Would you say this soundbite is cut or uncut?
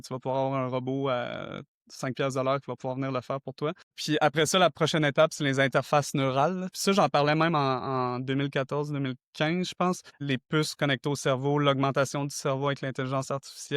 cut